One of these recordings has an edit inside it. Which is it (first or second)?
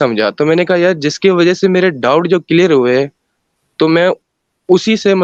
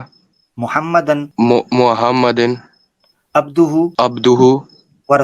second